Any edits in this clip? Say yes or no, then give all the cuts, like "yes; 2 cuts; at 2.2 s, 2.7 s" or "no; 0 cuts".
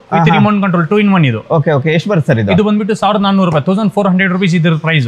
no; 0 cuts